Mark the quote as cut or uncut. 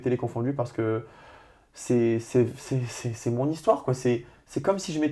uncut